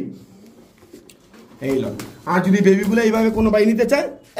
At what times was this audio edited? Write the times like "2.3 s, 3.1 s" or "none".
none

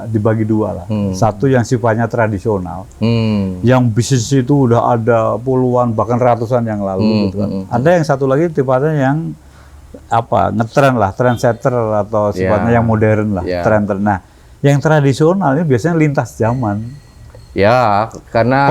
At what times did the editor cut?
none

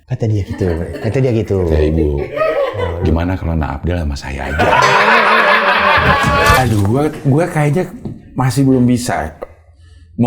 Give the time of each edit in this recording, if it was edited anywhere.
6.6 s

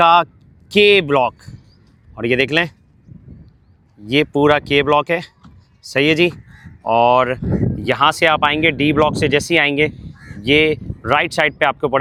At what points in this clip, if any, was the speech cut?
none

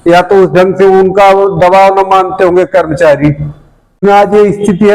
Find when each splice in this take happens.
4.0 s

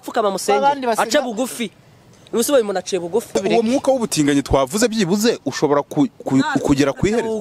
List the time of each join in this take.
3.3 s

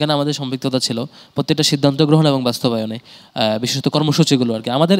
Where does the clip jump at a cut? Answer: none

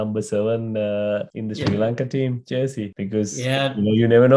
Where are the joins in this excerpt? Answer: 1.3 s, 2.9 s

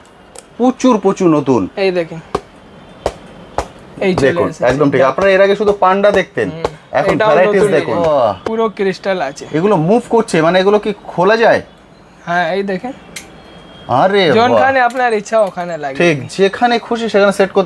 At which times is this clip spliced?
7.9 s

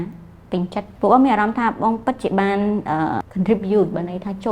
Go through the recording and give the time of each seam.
0.9 s, 3.3 s

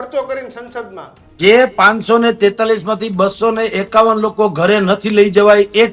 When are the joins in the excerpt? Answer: 1.2 s

